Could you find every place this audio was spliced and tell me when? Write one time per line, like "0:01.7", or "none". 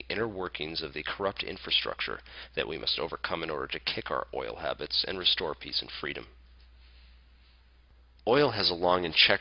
0:03.2